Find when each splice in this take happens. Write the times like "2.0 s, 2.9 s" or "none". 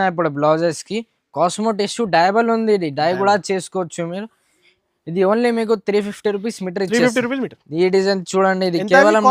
7.6 s